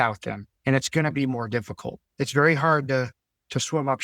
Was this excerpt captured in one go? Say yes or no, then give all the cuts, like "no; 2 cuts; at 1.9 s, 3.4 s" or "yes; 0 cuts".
no; 1 cut; at 2.1 s